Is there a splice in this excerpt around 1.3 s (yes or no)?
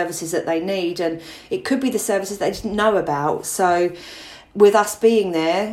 no